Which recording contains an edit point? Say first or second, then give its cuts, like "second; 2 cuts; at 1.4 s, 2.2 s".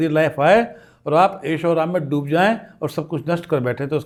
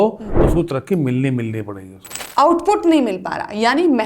second; 1 cut; at 2.2 s